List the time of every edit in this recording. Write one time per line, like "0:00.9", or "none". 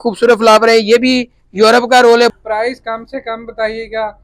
0:02.3